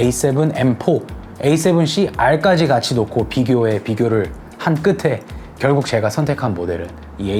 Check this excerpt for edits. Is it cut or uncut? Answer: uncut